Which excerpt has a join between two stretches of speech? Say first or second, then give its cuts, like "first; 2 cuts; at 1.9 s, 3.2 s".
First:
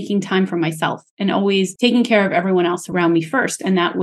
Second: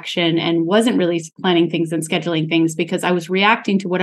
first; 2 cuts; at 1.7 s, 2.9 s